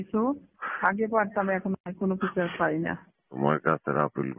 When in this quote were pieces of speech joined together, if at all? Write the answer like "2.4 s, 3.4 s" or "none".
3.3 s